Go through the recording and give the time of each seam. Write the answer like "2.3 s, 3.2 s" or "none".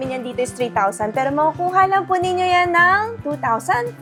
none